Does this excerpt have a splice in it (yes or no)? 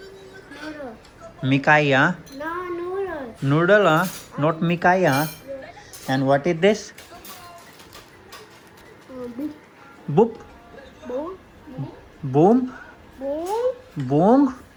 no